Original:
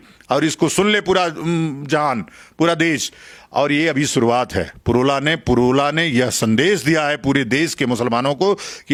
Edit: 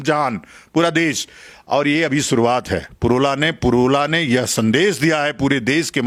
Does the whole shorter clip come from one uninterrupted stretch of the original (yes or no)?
yes